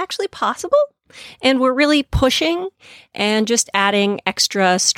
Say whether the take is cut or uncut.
uncut